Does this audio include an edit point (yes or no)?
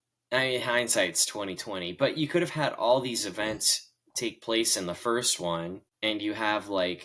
yes